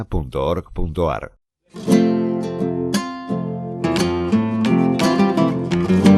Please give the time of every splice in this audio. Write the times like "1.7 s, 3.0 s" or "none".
none